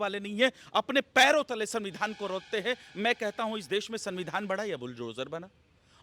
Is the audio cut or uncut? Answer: uncut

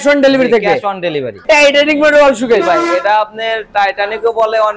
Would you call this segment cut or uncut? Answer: cut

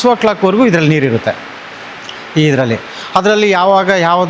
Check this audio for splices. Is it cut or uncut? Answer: uncut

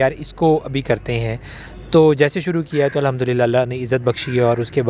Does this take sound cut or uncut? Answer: uncut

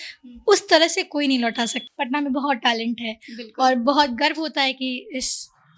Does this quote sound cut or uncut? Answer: cut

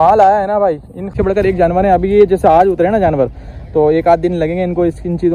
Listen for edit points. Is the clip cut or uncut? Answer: cut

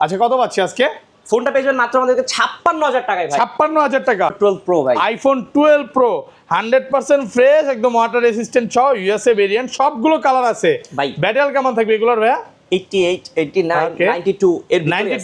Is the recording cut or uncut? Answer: cut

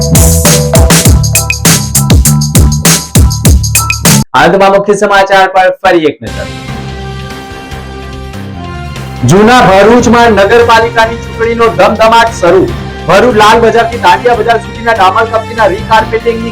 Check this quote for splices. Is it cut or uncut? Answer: uncut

